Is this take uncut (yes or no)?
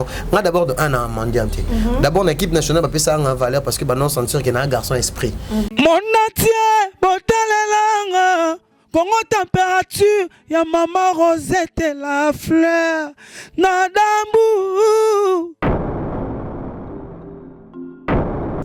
no